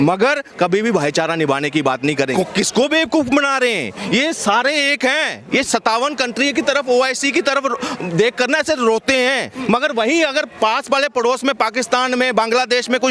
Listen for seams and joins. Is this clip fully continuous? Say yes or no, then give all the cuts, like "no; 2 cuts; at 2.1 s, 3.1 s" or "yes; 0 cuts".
no; 2 cuts; at 2.3 s, 9.5 s